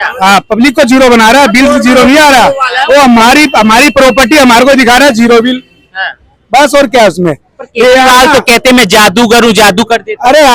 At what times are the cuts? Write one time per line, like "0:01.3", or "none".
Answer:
none